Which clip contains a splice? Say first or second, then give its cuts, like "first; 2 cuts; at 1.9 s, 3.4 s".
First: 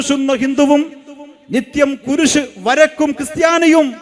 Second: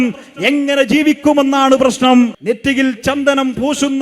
second; 1 cut; at 2.4 s